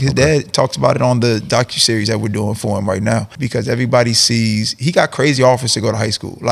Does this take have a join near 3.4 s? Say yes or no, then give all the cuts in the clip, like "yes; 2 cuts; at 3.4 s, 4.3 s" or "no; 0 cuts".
yes; 1 cut; at 3.4 s